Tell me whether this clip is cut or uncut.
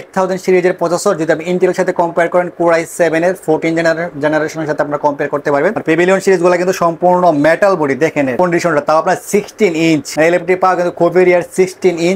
uncut